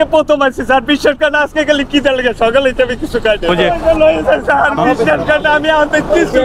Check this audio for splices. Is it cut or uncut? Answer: cut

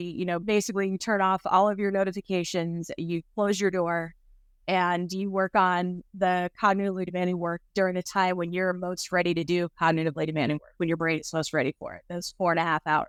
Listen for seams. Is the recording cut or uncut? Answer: uncut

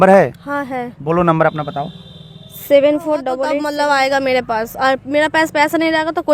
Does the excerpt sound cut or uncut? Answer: cut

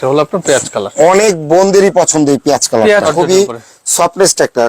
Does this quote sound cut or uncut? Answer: cut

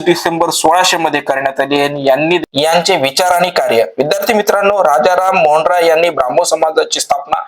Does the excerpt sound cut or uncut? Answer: cut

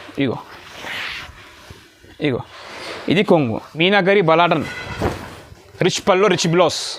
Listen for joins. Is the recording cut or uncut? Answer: cut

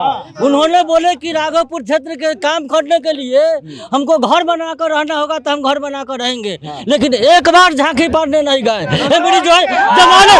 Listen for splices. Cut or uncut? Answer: uncut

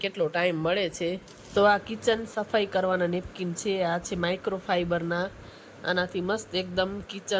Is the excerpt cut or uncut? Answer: cut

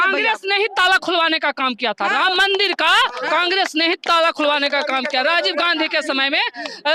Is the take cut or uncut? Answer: uncut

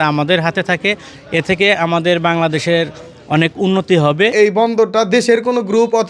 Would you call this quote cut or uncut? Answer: cut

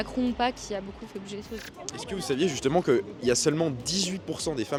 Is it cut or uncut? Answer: uncut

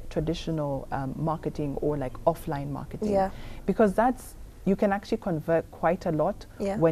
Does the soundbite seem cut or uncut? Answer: uncut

